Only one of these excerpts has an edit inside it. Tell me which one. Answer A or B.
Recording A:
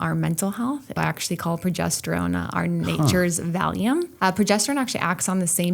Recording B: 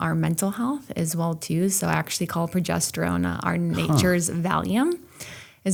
A